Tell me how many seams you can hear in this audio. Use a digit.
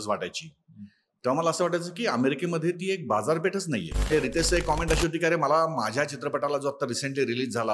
1